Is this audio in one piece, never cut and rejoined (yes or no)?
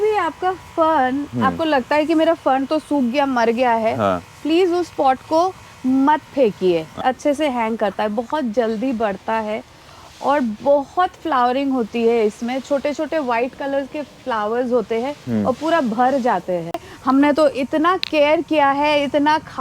no